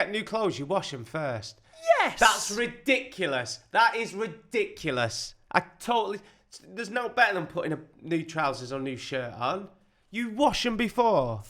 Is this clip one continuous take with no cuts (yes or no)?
yes